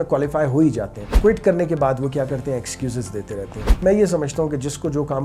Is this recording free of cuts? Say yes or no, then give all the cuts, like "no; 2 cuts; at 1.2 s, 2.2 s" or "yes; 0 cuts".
no; 2 cuts; at 1.0 s, 3.6 s